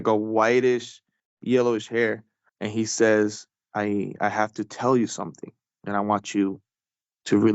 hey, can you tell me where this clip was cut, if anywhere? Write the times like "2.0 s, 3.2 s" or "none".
3.6 s